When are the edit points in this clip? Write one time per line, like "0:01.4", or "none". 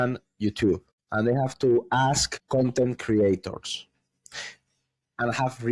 0:01.0
0:02.3

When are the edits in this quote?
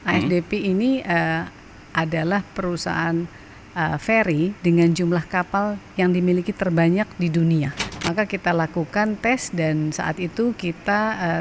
0:07.7

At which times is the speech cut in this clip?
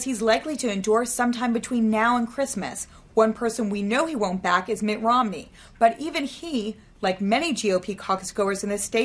none

